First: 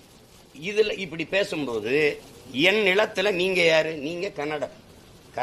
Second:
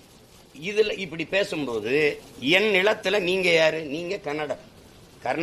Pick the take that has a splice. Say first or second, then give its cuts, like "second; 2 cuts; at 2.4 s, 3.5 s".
second; 1 cut; at 2.3 s